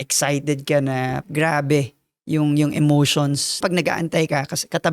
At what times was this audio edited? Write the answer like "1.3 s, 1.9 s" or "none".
1.2 s, 3.6 s